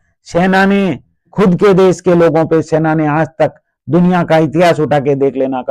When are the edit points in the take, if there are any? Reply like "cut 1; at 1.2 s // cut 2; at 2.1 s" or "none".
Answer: cut 1; at 1.3 s